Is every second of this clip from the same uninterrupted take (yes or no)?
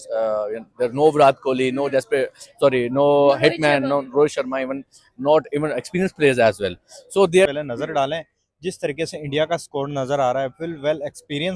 no